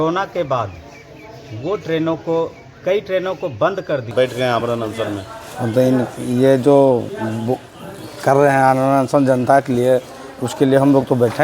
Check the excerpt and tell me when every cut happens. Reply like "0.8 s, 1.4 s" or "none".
4.1 s